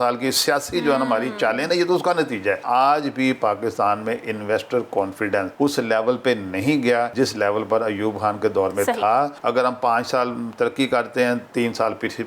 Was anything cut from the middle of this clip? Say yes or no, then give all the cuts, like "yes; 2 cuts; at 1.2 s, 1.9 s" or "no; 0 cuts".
yes; 4 cuts; at 2.6 s, 5.5 s, 7.1 s, 9.4 s